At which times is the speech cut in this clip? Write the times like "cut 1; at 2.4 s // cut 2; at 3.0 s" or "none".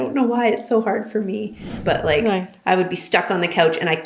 cut 1; at 1.7 s